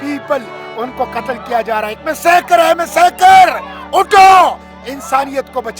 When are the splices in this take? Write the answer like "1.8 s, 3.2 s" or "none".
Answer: none